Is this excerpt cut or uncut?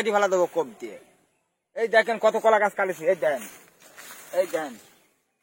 uncut